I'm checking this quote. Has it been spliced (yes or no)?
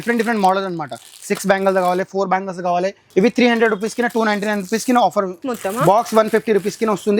yes